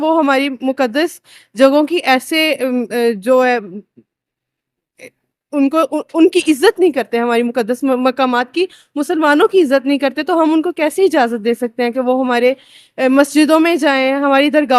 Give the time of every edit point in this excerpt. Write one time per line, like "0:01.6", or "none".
none

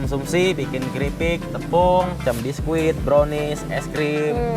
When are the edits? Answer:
0:02.2

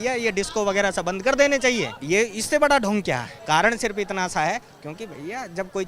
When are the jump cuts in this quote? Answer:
0:01.9
0:03.3

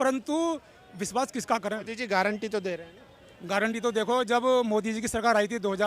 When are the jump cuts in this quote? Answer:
0:02.0

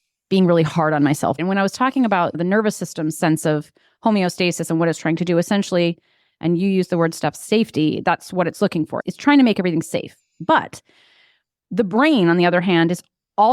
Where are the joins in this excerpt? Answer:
0:01.4
0:02.4
0:09.0

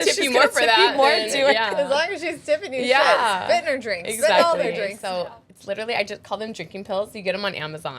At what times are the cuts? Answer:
0:05.0

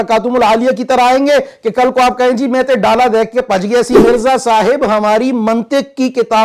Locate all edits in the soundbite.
0:04.0

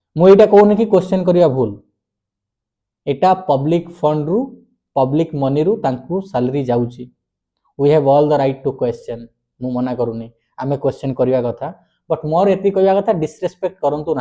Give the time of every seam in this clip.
none

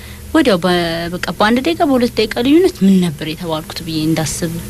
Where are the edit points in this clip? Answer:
none

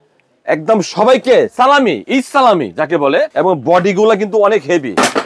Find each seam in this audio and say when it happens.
0:03.3

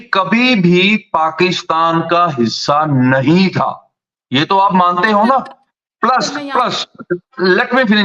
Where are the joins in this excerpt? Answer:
none

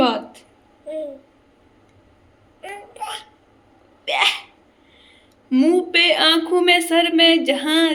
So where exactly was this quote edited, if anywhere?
none

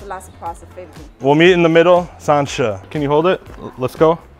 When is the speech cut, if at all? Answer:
0:01.0
0:02.8

